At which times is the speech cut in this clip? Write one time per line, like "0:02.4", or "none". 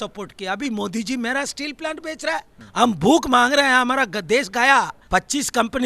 0:02.6
0:05.0